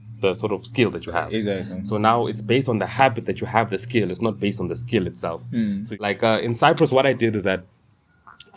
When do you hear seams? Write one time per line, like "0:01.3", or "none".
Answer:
0:06.0